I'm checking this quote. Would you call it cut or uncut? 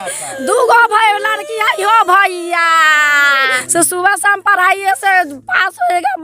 cut